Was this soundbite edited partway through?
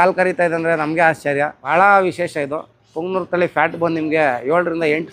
yes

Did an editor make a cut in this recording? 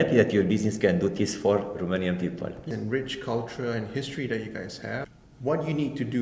yes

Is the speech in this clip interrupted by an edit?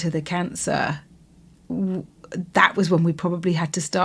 no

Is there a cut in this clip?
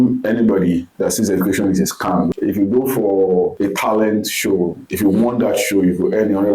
yes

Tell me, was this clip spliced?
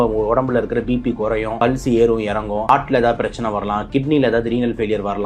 yes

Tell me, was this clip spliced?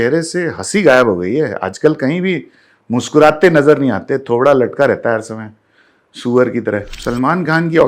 yes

